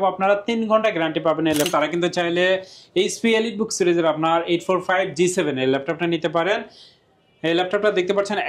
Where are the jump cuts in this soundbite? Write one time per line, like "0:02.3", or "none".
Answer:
0:01.7